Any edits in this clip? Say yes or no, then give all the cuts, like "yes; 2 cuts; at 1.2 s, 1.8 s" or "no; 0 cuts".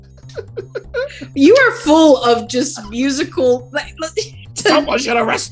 yes; 1 cut; at 4.4 s